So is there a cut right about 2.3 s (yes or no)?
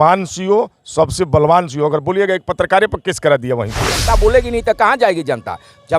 no